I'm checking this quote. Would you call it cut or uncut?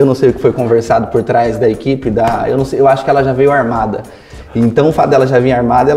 uncut